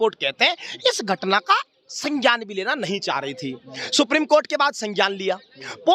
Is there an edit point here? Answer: no; 0 cuts

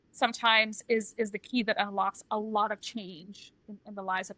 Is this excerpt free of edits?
yes; 0 cuts

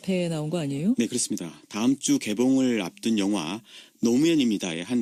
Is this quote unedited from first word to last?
yes; 0 cuts

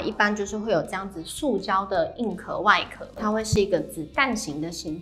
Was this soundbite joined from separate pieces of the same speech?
yes; 1 cut; at 3.2 s

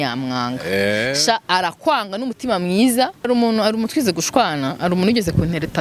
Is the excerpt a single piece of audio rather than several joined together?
no; 1 cut; at 3.3 s

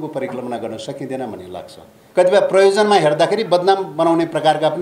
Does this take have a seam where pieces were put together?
yes; 1 cut; at 1.9 s

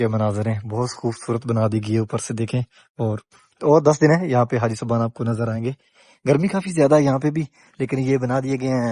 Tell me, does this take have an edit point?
no; 0 cuts

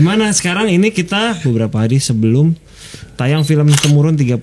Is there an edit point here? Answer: yes; 1 cut; at 1.4 s

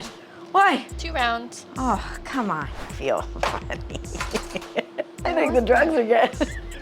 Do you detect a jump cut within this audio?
yes; 2 cuts; at 2.8 s, 5.1 s

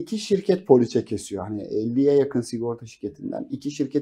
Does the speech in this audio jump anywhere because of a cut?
no; 0 cuts

